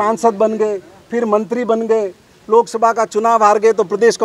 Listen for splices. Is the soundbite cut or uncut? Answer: uncut